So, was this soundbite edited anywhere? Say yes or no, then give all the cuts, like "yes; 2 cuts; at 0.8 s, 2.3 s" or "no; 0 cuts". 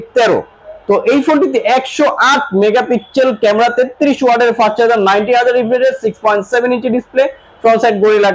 no; 0 cuts